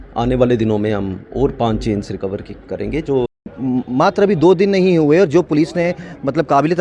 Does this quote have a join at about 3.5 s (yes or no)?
yes